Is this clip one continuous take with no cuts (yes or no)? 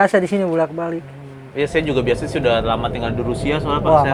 yes